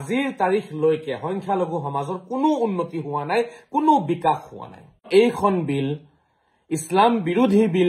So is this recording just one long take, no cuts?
no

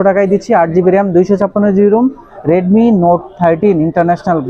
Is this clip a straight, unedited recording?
yes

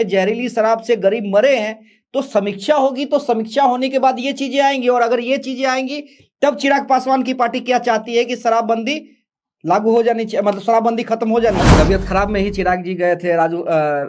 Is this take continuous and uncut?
no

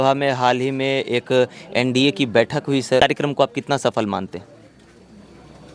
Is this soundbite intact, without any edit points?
no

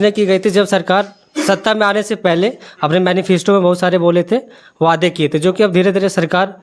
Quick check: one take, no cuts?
yes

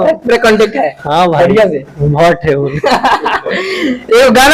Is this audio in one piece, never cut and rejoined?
yes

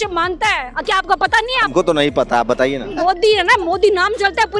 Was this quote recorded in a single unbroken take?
no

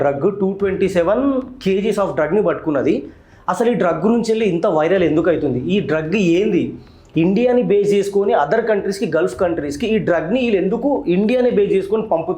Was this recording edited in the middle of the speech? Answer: no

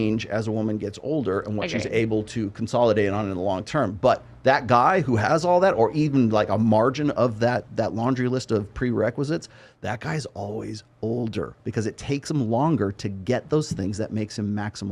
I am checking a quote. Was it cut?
no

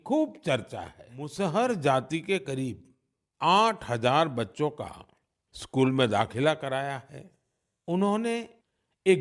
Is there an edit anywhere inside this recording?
yes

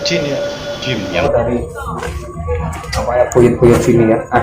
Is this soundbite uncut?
no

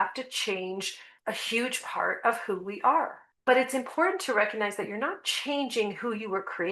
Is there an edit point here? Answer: yes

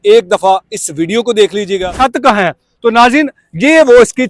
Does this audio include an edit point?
yes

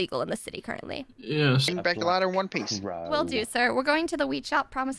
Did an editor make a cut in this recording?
yes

